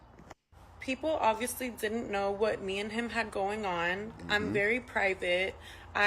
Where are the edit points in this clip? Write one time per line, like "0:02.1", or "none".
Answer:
0:04.5